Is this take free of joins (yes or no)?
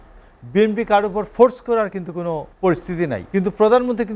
no